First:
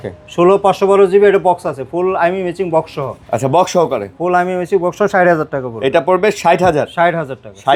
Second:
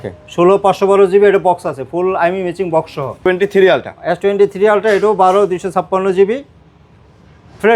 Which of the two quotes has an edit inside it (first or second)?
second